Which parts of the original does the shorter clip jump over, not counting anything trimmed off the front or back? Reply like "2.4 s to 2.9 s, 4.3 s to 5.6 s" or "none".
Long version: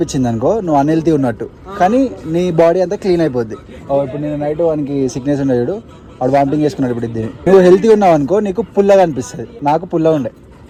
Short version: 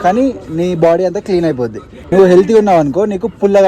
3.7 s to 7.2 s